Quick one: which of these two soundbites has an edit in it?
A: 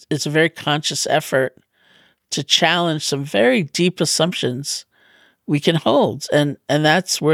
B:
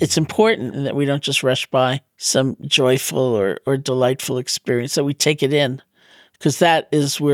B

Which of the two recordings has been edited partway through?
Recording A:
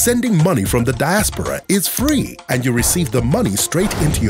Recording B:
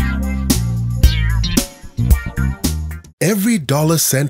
B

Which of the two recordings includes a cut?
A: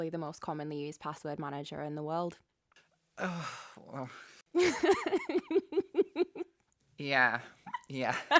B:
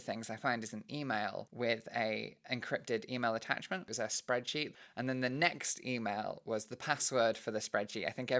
B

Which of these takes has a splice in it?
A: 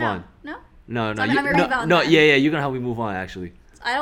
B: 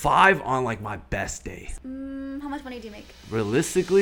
B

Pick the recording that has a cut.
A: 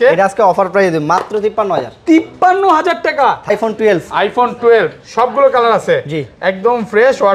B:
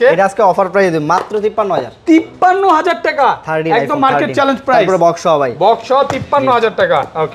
A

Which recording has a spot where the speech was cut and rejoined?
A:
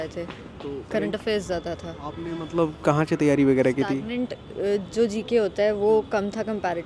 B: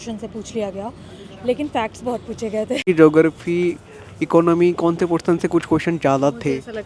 B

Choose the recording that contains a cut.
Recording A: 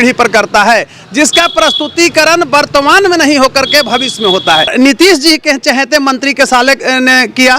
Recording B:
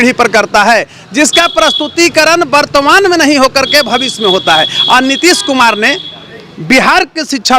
A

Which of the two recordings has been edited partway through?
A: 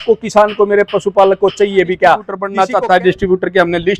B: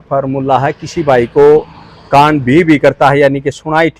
A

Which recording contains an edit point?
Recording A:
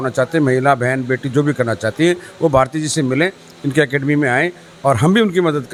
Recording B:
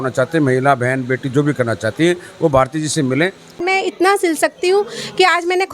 B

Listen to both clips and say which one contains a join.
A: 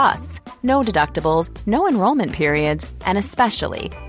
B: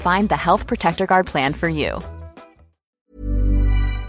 B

